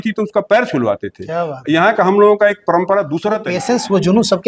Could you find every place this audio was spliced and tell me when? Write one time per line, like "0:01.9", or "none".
0:03.5

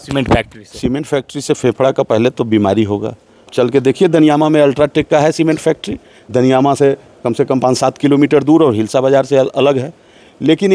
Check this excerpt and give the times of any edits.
0:03.5

